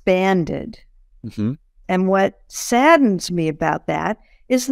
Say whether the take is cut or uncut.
cut